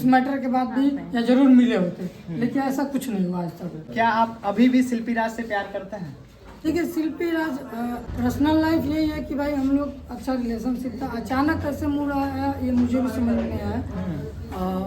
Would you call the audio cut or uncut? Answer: cut